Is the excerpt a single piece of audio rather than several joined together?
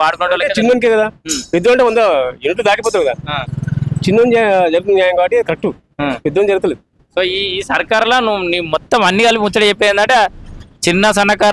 yes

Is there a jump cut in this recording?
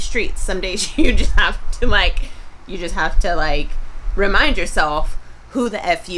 no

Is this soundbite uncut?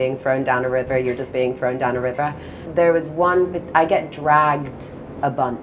yes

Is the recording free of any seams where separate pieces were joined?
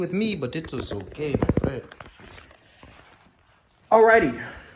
yes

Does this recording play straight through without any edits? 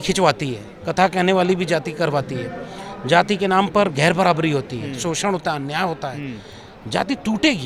yes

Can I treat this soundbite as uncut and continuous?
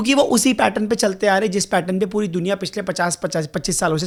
yes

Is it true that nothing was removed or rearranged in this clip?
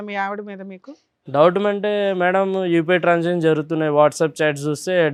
yes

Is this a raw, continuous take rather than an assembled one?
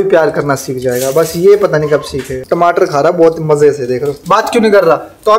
no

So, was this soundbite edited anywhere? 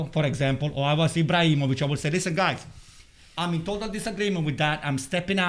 no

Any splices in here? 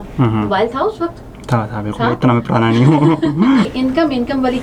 yes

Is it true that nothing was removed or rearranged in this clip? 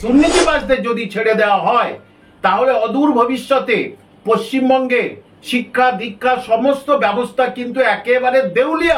yes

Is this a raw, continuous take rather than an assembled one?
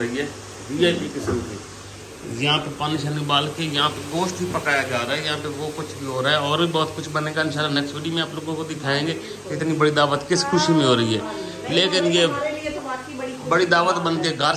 yes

